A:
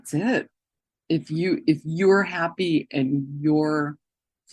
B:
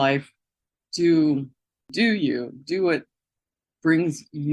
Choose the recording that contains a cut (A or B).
B